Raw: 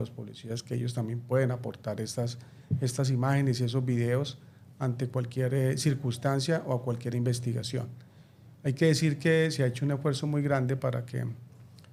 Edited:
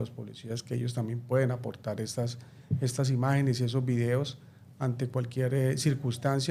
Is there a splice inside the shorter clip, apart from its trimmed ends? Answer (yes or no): no